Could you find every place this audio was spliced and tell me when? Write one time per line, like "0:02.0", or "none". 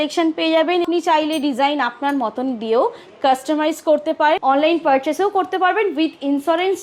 0:00.8
0:04.4